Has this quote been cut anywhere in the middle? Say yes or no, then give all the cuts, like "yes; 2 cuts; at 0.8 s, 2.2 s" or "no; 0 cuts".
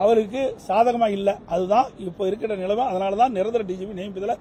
no; 0 cuts